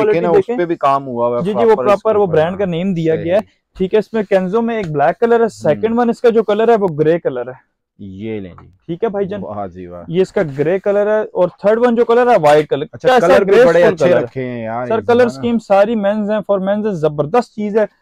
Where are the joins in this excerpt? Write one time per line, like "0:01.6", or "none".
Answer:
none